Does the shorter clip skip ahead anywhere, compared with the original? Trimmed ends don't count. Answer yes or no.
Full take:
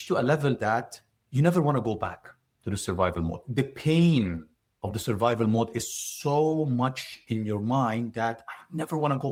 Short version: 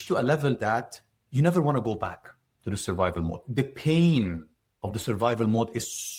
no